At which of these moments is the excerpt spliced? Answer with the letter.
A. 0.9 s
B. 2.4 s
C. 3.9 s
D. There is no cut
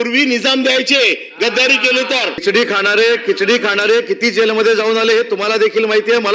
B